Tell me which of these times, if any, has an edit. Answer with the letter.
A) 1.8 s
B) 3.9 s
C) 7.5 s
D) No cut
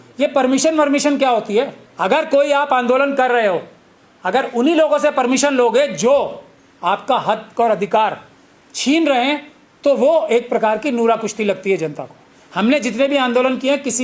A